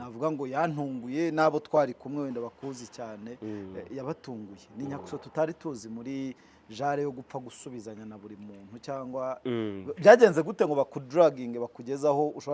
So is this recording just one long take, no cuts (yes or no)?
yes